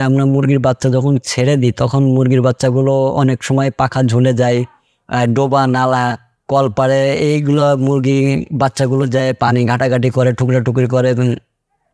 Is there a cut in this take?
no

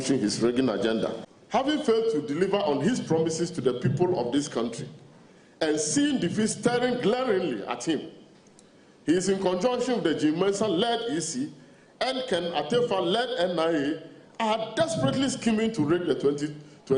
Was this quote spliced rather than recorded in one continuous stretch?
yes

